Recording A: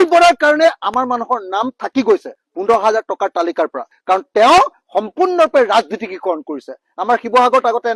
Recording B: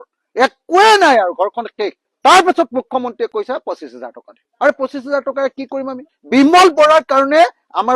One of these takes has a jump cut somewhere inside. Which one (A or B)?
B